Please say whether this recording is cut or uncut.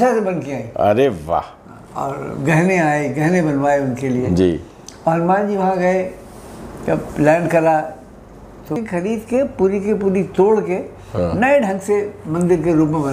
cut